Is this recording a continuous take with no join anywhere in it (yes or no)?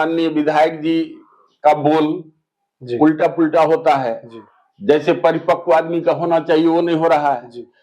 yes